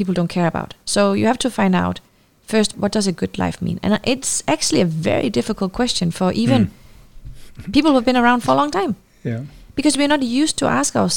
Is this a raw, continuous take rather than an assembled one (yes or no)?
no